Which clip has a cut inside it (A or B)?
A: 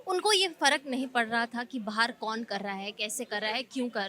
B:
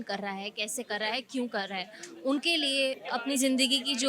B